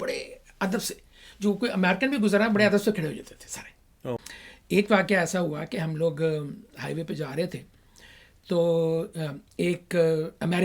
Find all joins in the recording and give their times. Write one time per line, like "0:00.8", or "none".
0:04.2